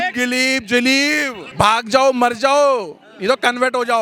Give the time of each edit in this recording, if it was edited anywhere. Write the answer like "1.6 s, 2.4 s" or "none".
1.4 s